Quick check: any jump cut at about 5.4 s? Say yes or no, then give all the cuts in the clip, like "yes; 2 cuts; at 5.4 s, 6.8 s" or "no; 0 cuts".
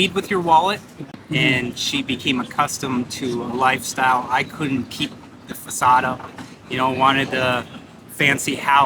no; 1 cut; at 1.1 s